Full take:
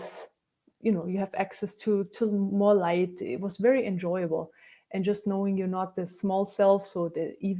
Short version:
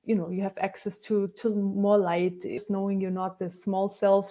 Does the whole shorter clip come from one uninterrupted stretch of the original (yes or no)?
no